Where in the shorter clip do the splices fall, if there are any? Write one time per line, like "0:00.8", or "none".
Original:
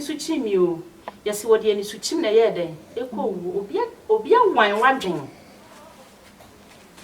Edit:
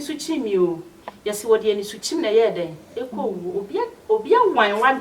none